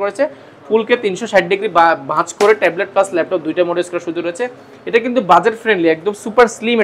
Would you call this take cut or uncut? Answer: uncut